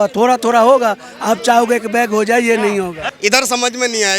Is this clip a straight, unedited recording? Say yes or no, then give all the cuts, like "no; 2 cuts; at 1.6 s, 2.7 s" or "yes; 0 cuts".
no; 1 cut; at 3.0 s